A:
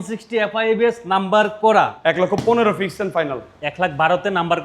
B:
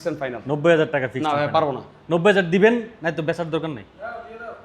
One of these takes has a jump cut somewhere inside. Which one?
A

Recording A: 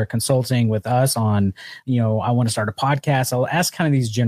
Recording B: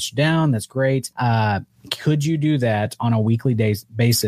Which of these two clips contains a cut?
B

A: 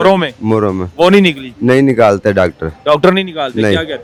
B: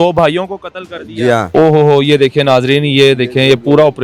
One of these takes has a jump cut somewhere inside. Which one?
B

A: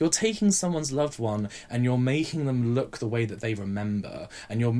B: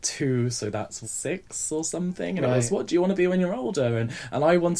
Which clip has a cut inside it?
B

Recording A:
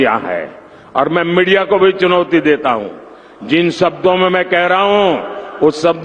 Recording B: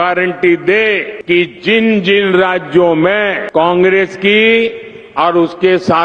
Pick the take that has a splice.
B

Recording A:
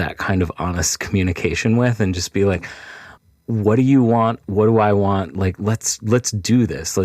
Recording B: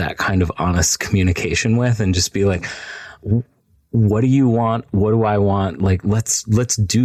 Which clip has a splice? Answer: A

